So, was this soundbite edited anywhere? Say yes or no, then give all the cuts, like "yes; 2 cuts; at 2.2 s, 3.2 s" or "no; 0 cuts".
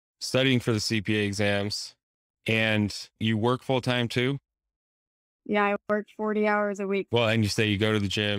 yes; 2 cuts; at 3.2 s, 7.1 s